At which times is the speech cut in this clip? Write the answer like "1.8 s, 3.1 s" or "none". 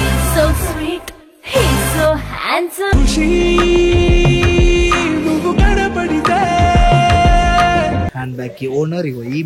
8.2 s